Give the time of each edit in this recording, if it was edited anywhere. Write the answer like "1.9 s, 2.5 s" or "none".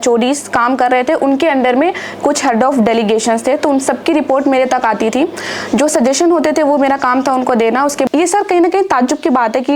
8.1 s